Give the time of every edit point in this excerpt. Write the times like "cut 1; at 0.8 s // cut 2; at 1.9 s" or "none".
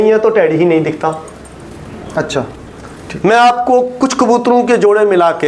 cut 1; at 3.0 s